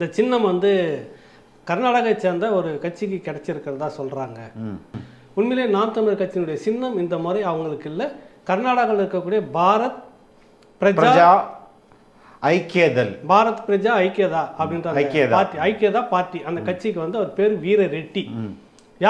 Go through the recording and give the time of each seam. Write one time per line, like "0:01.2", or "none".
0:05.0